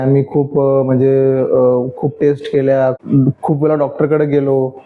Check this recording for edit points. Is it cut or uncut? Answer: cut